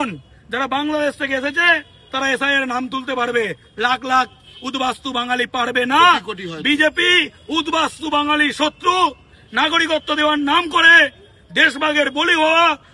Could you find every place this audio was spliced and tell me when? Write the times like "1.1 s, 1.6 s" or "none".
none